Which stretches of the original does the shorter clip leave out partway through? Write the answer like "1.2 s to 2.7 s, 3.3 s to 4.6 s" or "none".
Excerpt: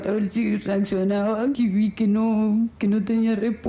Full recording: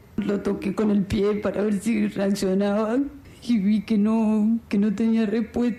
3.1 s to 3.5 s